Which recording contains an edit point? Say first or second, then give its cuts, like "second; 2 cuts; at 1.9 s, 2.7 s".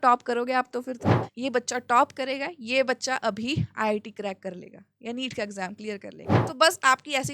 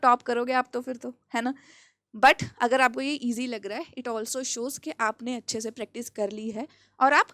first; 2 cuts; at 1.2 s, 6.4 s